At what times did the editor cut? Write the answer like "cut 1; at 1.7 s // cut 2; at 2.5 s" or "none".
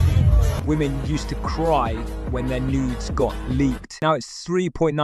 none